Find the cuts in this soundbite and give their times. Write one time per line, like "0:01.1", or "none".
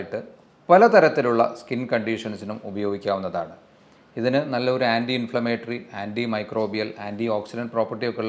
none